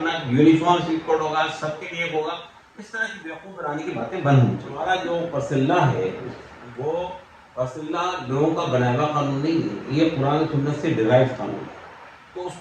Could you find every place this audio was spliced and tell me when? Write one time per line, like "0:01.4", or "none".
0:04.7